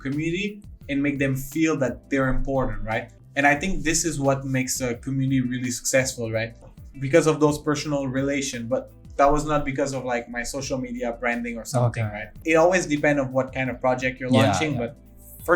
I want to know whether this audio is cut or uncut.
cut